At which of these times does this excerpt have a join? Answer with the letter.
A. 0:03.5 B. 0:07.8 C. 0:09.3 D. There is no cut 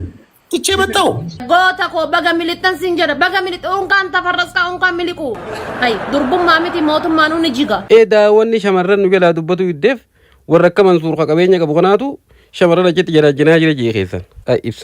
B